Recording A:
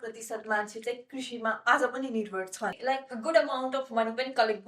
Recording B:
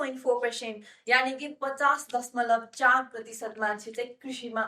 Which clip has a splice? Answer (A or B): A